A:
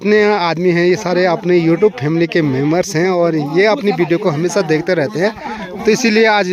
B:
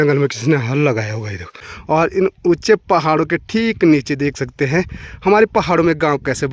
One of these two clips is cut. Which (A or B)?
B